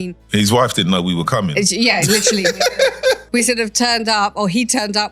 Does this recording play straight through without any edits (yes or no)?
yes